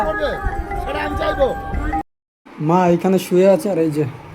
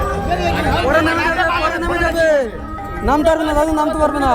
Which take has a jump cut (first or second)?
first